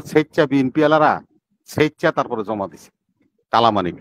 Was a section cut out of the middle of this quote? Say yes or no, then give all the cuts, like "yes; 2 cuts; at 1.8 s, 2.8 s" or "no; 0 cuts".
no; 0 cuts